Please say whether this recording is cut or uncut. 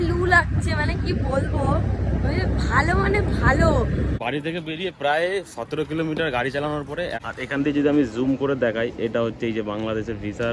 cut